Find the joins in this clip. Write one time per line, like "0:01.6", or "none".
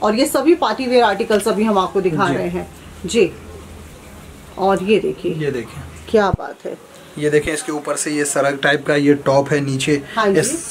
none